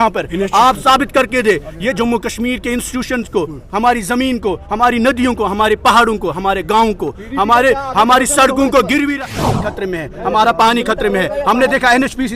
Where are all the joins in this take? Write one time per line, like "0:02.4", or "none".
0:09.2